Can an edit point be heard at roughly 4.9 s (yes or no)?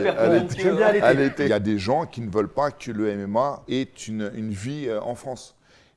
no